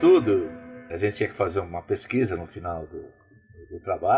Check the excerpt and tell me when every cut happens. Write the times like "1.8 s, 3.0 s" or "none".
0.9 s

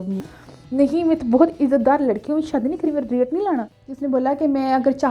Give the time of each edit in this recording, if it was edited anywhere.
3.7 s

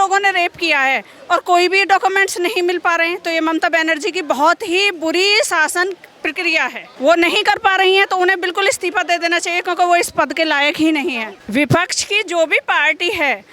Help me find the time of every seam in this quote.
6.9 s, 11.3 s

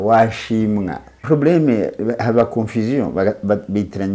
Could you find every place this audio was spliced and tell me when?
1.1 s

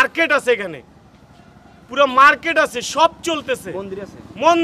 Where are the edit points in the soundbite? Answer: none

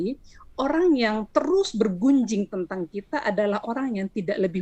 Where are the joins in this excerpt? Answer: none

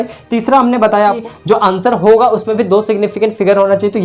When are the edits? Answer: 1.2 s

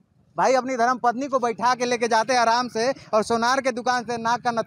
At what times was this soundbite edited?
none

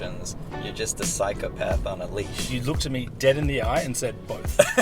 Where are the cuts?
2.5 s

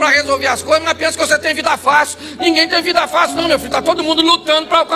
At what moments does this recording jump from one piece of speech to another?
none

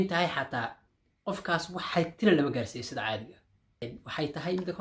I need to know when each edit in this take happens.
3.8 s

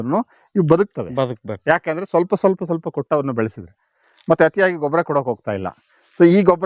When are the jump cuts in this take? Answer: none

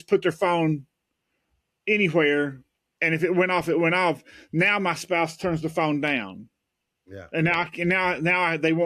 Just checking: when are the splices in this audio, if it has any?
none

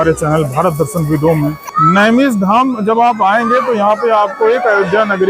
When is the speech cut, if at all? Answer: 1.6 s

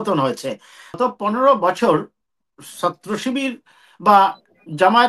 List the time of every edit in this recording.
1.0 s

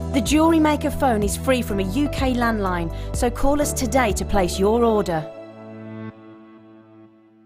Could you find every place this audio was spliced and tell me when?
none

